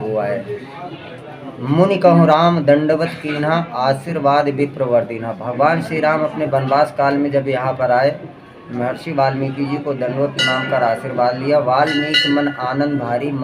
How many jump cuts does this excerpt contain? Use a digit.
0